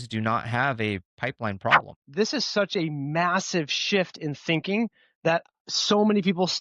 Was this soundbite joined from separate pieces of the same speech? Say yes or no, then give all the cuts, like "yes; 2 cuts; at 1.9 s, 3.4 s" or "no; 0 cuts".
yes; 1 cut; at 2.0 s